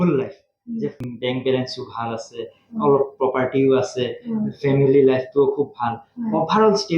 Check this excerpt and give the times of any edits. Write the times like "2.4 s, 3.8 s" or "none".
1.1 s